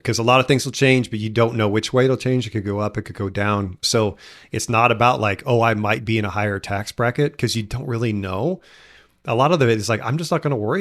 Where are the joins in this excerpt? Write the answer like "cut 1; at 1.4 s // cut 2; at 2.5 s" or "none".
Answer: cut 1; at 3.8 s